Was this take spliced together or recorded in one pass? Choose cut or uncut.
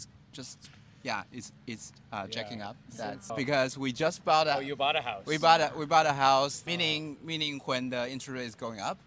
cut